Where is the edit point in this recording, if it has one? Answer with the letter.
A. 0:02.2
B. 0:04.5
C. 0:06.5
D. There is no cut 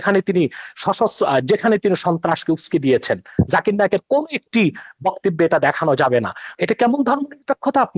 C